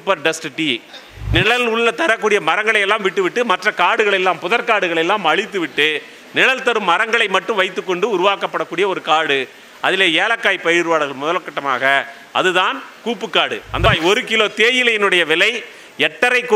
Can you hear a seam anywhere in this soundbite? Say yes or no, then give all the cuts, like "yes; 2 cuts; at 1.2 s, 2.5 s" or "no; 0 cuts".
yes; 2 cuts; at 1.2 s, 13.9 s